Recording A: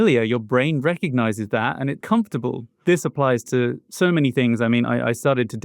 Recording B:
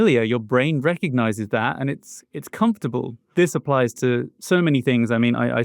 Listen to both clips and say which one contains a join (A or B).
A